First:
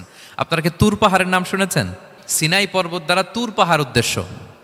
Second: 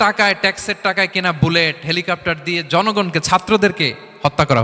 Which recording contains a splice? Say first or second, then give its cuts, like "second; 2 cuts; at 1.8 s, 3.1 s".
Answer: first; 1 cut; at 2.2 s